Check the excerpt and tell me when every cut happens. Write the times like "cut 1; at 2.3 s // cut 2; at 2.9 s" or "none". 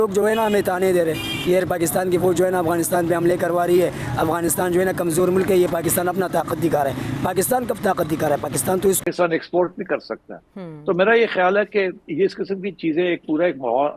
cut 1; at 9.0 s